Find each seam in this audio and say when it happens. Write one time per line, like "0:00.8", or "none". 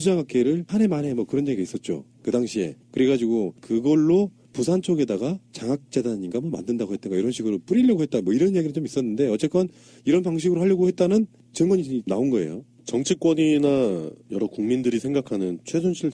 0:09.5